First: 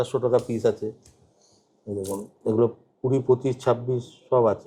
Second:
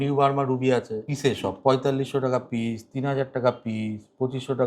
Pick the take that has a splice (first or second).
second